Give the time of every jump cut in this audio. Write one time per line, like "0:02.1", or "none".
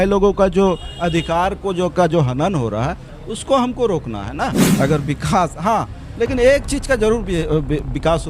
0:04.6